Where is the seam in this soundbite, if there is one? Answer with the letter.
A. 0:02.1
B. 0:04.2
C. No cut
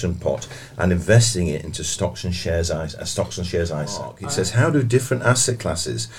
B